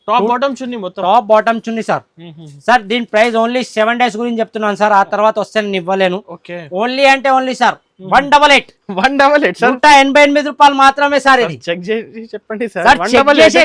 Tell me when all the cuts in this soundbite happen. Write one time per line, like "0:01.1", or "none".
none